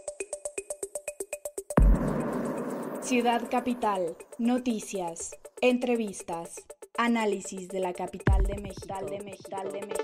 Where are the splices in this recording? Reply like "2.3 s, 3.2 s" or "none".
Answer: 1.7 s